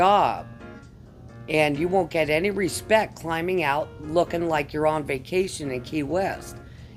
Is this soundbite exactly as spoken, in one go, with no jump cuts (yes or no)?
yes